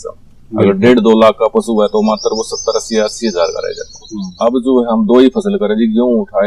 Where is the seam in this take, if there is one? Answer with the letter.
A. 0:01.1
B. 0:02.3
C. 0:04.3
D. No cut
C